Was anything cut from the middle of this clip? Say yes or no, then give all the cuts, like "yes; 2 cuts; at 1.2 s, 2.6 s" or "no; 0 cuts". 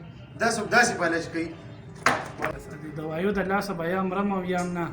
yes; 1 cut; at 2.5 s